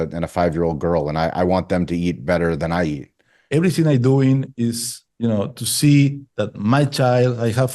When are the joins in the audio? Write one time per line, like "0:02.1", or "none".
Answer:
0:03.3